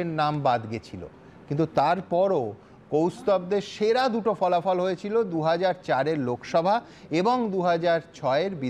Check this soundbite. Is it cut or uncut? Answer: uncut